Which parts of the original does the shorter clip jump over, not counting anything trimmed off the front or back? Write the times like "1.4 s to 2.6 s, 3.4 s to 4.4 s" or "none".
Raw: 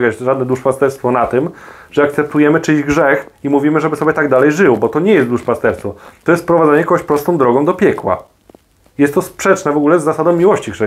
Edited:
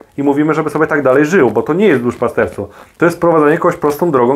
none